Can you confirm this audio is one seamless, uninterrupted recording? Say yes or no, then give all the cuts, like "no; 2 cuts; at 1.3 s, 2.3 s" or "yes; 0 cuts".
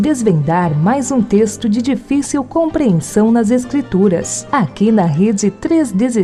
yes; 0 cuts